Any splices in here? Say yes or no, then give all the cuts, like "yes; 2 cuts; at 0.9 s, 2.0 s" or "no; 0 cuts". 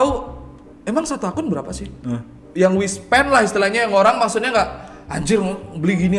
yes; 1 cut; at 2.3 s